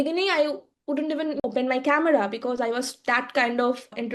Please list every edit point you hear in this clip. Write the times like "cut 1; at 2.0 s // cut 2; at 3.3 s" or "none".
cut 1; at 1.4 s